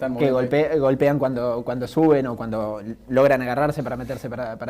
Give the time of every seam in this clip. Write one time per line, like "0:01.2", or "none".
0:01.9